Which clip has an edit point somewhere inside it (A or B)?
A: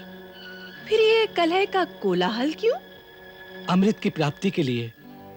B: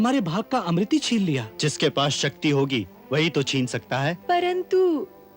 B